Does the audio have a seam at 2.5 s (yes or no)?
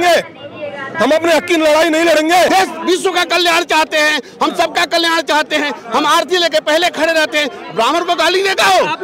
yes